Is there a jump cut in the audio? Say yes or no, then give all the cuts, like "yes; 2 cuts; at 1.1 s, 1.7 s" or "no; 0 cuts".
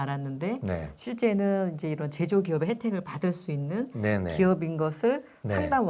no; 0 cuts